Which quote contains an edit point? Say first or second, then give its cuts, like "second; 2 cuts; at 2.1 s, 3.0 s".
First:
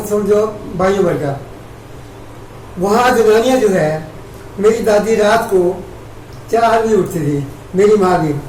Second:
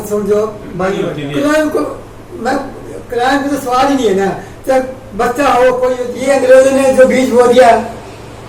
second; 2 cuts; at 1.2 s, 6.1 s